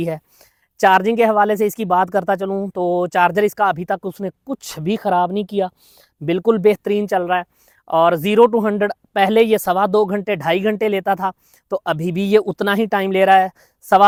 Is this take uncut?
yes; 0 cuts

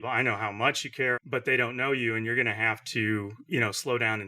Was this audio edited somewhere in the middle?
yes; 1 cut; at 1.2 s

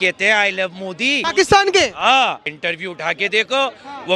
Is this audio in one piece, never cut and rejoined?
no; 2 cuts; at 1.2 s, 2.5 s

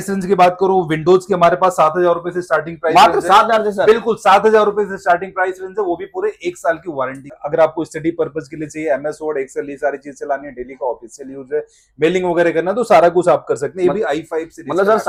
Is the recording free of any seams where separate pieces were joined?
yes; 0 cuts

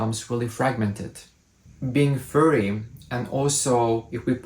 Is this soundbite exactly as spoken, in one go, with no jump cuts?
no; 1 cut; at 1.5 s

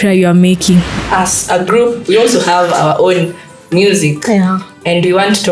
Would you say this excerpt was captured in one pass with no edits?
no; 1 cut; at 0.9 s

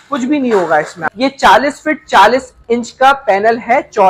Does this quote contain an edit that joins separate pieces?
yes; 1 cut; at 1.0 s

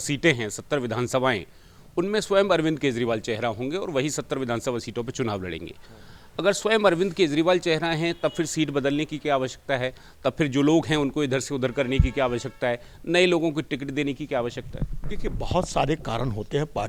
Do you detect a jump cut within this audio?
no; 0 cuts

